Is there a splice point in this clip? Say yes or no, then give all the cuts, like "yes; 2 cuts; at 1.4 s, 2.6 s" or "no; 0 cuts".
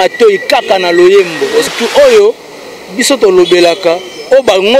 yes; 1 cut; at 1.6 s